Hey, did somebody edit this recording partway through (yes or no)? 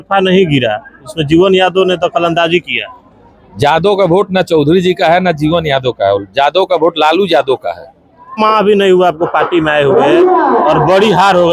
yes